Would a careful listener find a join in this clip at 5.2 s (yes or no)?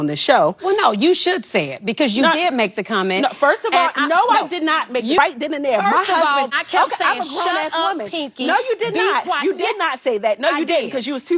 yes